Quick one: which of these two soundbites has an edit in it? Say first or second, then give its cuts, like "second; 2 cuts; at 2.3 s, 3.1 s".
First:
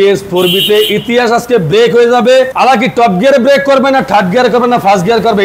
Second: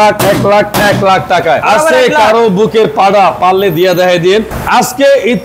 second; 2 cuts; at 1.6 s, 4.6 s